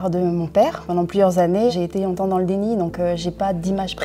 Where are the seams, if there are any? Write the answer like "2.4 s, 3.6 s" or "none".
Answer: none